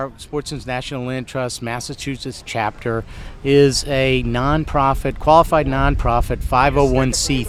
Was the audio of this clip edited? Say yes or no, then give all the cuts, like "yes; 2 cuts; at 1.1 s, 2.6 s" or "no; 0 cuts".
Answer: no; 0 cuts